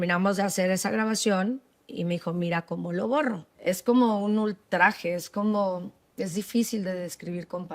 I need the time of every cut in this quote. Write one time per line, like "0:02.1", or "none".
0:03.5